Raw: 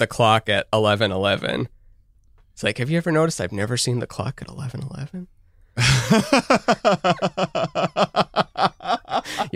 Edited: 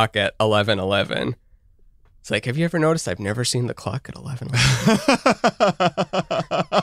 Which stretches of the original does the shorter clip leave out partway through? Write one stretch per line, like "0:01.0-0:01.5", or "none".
0:04.7-0:05.7